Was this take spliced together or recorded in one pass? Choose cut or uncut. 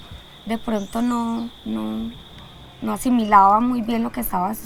uncut